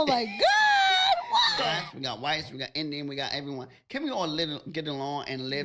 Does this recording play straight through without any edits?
no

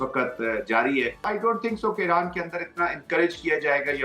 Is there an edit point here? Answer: yes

